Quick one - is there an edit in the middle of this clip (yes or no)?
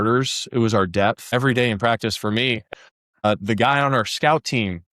yes